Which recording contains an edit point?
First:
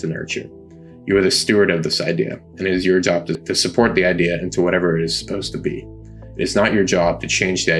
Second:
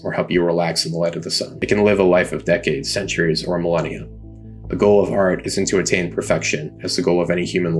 first; 1 cut; at 3.5 s

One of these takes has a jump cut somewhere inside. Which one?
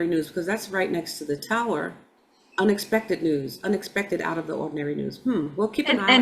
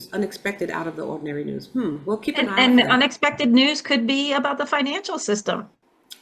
first; 1 cut; at 2.2 s

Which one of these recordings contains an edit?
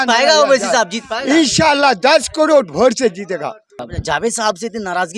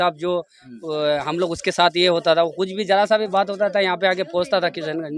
first; 1 cut; at 3.8 s

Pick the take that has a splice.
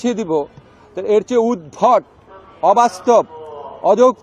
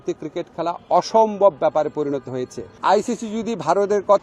second; 1 cut; at 2.8 s

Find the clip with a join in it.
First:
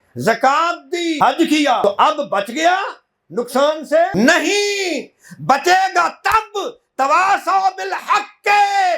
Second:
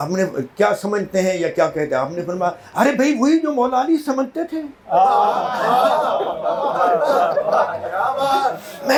first; 3 cuts; at 1.2 s, 1.8 s, 4.1 s

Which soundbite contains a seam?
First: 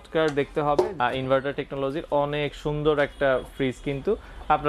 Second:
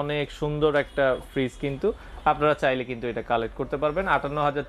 first; 1 cut; at 0.9 s

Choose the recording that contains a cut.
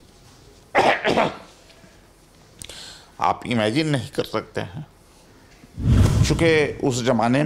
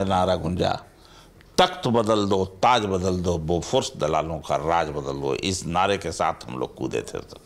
first; 1 cut; at 5.9 s

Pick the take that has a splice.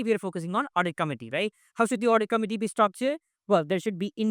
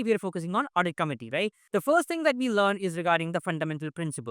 second; 1 cut; at 1.6 s

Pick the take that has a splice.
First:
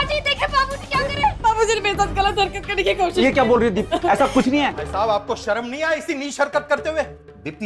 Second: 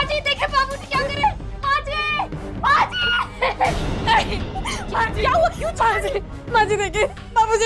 first; 2 cuts; at 1.4 s, 4.8 s

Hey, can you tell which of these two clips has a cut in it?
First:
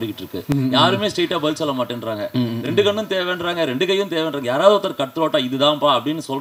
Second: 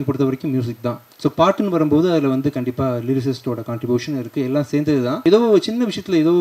second; 2 cuts; at 1.1 s, 5.2 s

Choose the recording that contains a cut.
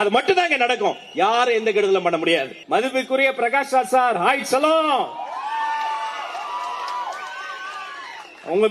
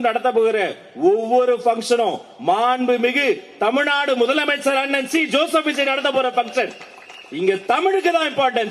first; 1 cut; at 2.6 s

